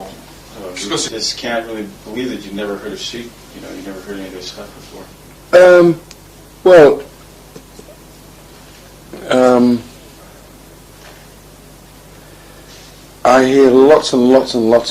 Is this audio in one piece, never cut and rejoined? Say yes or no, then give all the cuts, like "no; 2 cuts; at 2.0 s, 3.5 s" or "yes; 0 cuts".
no; 1 cut; at 1.3 s